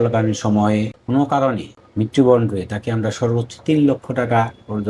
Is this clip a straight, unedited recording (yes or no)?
yes